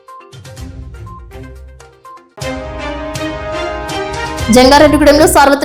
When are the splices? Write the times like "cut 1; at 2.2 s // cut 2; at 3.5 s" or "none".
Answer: none